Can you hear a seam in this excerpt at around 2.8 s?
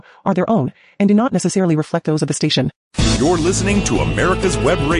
yes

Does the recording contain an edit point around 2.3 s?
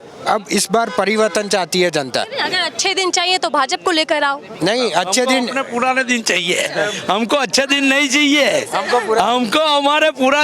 no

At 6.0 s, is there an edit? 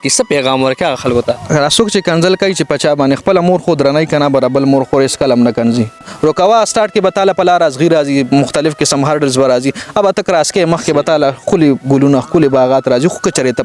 yes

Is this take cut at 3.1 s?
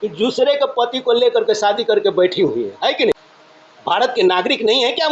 yes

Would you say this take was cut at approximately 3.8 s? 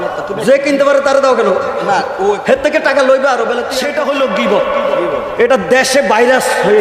yes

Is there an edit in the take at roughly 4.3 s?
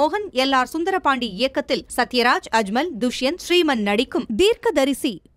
yes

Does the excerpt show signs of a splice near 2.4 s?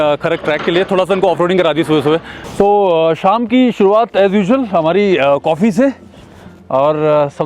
yes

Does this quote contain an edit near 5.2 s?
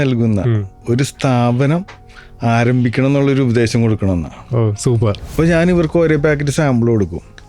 yes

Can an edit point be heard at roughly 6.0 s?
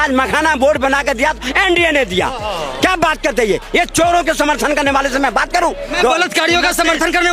yes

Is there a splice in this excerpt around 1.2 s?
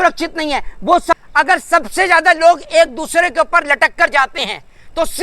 yes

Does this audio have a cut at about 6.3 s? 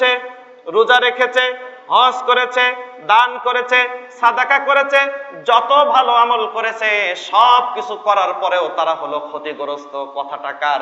no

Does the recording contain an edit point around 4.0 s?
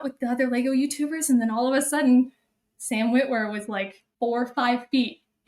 yes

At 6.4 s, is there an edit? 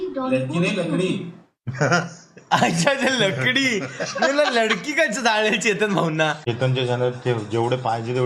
yes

